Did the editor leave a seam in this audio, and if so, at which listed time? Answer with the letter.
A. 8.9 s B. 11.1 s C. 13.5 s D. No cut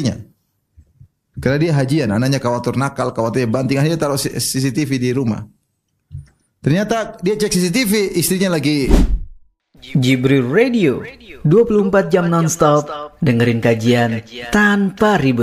A